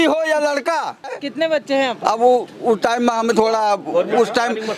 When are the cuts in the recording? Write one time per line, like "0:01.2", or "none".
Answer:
0:01.1
0:03.3